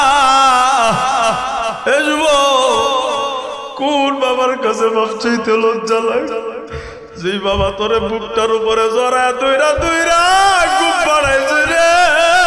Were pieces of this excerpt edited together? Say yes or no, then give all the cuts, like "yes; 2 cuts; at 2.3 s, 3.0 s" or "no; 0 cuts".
no; 0 cuts